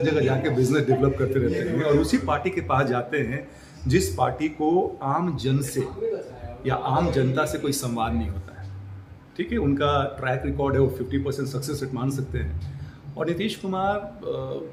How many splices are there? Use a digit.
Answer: 0